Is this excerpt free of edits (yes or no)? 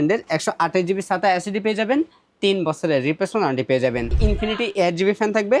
no